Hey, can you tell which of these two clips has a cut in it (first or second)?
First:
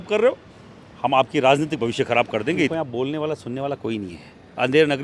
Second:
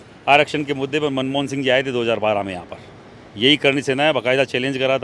first